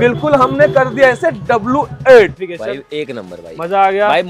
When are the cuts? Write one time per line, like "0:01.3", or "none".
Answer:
0:02.4